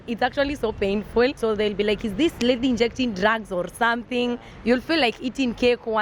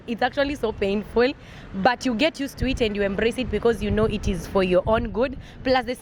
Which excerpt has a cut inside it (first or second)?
first